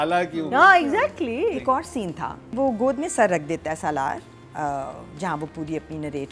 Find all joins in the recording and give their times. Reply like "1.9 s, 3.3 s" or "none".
2.5 s